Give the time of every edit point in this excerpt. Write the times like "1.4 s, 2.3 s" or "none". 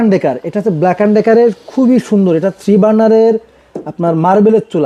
none